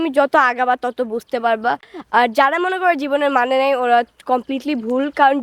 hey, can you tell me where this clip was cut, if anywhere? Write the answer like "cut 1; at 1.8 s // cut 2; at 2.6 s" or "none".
none